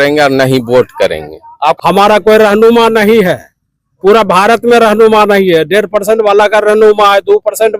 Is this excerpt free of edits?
no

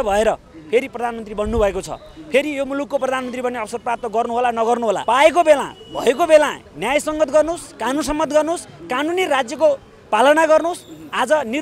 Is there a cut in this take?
no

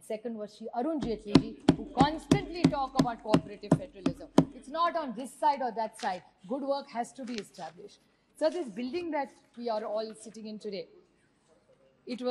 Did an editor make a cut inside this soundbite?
no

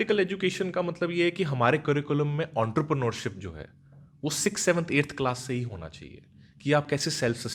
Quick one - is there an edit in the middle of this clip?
no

